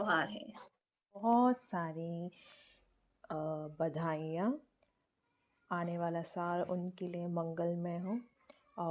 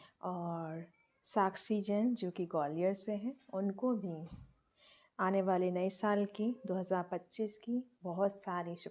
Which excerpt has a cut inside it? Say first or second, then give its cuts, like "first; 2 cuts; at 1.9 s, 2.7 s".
first; 1 cut; at 1.2 s